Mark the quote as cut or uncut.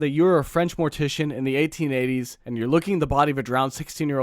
cut